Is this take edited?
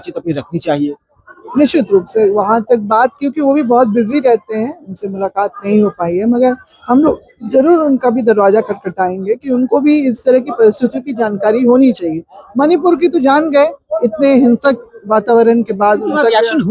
no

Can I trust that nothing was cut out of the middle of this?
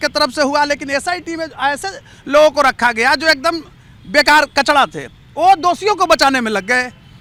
yes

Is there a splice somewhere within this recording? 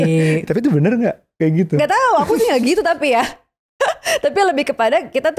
no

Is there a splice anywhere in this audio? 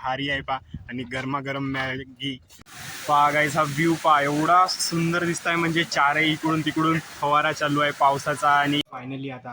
yes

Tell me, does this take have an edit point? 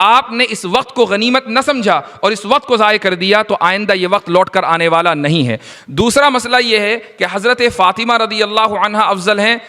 yes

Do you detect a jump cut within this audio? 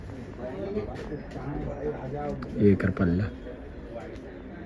no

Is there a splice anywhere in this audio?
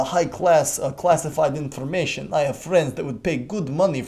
no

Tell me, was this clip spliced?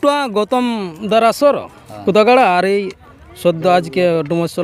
no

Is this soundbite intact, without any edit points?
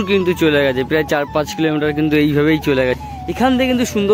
no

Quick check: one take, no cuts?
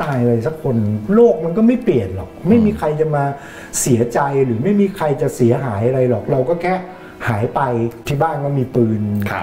no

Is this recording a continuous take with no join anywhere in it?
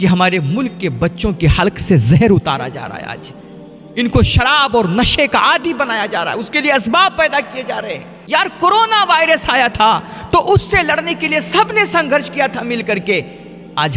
no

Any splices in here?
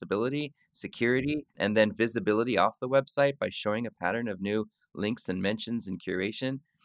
yes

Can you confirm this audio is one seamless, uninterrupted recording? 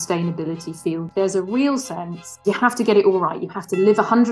no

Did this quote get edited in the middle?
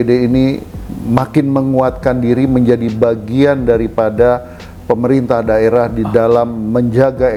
no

